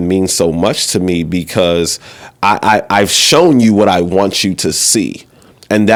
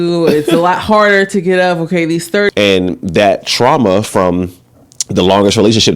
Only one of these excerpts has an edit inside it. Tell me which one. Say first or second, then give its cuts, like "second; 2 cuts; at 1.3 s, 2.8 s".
second; 1 cut; at 2.5 s